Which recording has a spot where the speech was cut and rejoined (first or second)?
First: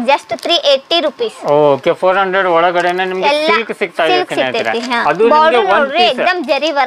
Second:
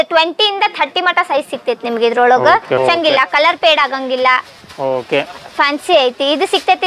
second